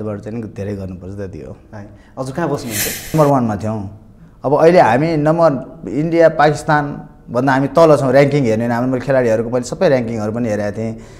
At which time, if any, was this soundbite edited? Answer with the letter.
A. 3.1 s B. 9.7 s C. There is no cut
A